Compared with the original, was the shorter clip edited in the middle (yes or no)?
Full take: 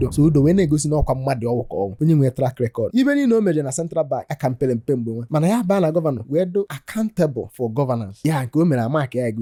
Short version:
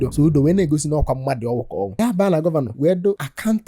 yes